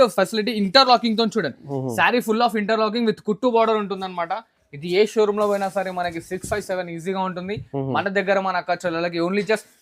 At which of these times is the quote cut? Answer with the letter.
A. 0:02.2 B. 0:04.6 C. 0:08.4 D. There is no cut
D